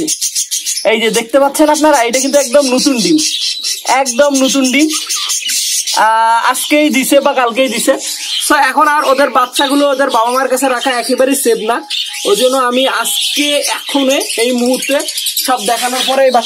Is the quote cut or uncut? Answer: uncut